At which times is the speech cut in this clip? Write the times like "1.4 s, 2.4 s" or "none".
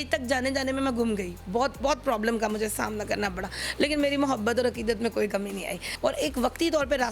5.8 s